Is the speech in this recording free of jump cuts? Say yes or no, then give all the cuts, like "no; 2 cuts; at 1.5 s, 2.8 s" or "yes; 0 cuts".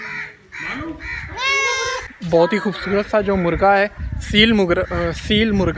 no; 1 cut; at 2.1 s